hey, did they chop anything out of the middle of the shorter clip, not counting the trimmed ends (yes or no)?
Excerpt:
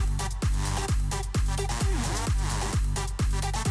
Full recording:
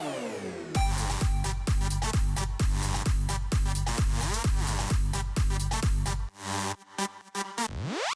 no